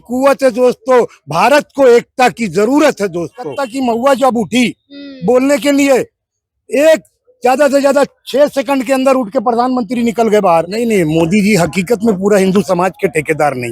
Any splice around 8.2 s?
no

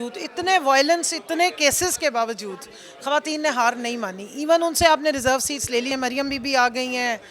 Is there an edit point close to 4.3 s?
no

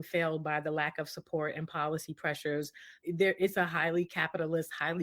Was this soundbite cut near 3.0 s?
yes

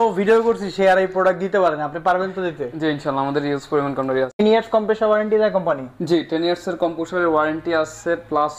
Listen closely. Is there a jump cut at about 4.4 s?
yes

